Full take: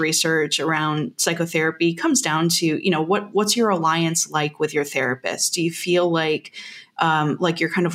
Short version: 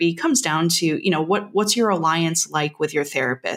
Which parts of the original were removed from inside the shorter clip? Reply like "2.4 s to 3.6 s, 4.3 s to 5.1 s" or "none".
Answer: none